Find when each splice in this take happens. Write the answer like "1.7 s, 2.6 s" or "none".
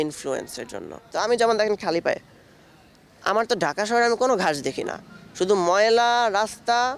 1.1 s